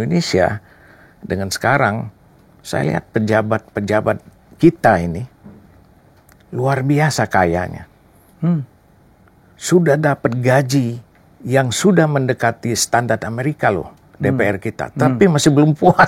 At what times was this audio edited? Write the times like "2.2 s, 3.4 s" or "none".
none